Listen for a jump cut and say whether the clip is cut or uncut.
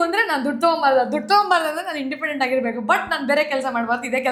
uncut